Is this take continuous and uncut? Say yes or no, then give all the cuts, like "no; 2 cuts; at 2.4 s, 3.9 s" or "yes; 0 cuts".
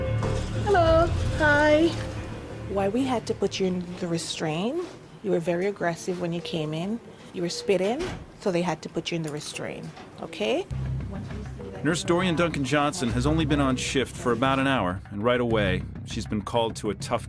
yes; 0 cuts